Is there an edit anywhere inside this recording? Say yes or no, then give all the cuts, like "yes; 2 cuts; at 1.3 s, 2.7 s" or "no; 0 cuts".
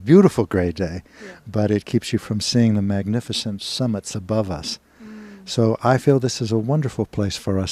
yes; 1 cut; at 3.3 s